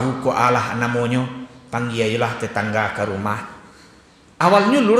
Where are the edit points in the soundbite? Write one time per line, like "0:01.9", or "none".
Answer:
none